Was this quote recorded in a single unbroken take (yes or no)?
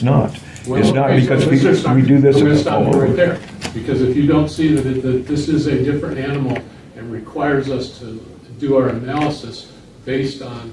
yes